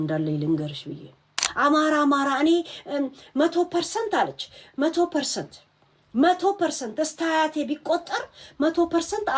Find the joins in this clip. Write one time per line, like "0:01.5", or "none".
0:01.4